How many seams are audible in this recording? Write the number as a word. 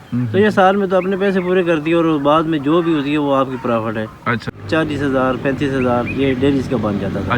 one